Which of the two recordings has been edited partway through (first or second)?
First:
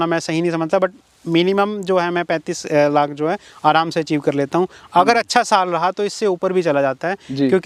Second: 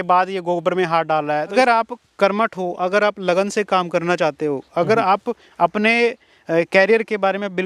second